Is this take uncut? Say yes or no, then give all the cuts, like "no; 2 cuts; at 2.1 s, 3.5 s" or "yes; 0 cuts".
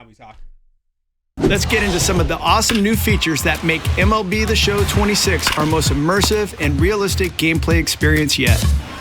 no; 1 cut; at 1.3 s